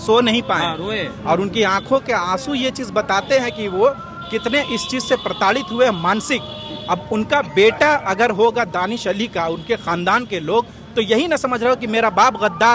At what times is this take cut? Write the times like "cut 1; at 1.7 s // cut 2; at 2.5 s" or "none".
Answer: none